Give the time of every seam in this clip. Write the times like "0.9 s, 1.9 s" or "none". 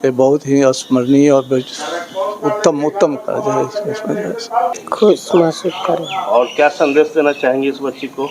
4.8 s